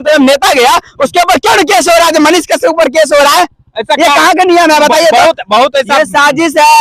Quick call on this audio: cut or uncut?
uncut